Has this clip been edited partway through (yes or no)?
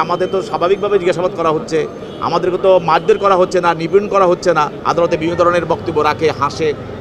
yes